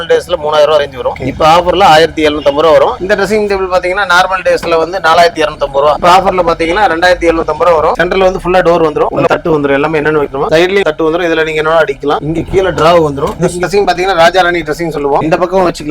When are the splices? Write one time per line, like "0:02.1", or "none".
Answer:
0:03.0
0:08.0
0:12.2
0:13.6